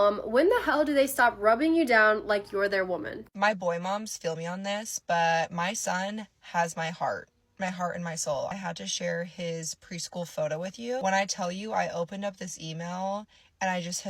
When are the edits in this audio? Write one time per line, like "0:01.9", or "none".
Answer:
0:03.1
0:08.5
0:11.0